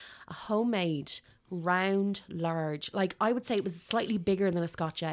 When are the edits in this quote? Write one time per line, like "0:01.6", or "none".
none